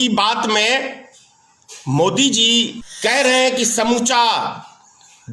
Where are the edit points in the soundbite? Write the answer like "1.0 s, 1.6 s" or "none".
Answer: 2.8 s

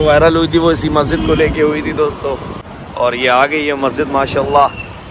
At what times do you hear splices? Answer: 2.6 s

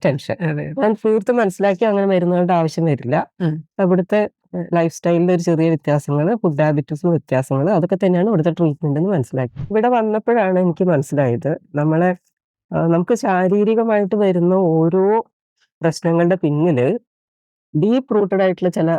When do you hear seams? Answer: 9.7 s

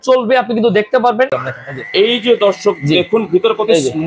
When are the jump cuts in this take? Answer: 1.3 s

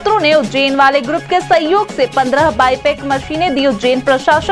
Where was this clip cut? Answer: none

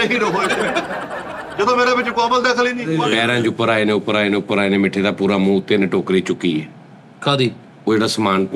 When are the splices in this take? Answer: 2.8 s

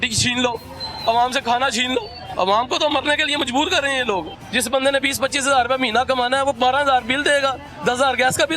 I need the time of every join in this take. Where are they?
2.2 s, 4.4 s

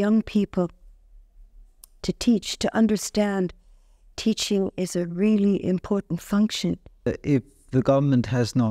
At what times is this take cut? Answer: 7.1 s

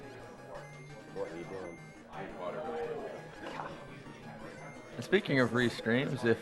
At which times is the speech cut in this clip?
1.3 s

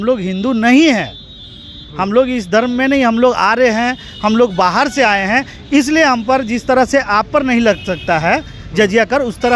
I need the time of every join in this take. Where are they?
none

